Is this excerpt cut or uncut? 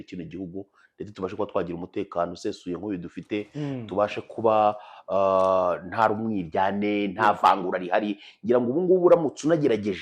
uncut